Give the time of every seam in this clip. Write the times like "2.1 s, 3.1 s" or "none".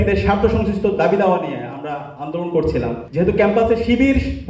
3.0 s